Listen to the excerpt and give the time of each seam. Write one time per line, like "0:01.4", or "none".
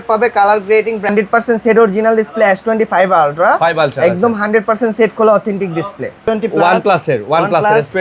0:01.1
0:06.2